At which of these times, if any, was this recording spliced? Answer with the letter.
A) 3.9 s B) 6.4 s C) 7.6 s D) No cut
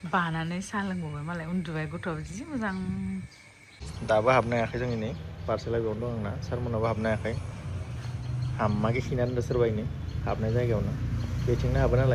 A